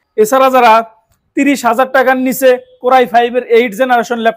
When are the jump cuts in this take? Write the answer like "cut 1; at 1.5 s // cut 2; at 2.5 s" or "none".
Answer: none